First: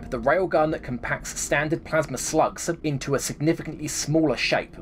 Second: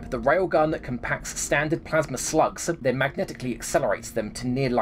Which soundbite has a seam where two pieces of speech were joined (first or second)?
second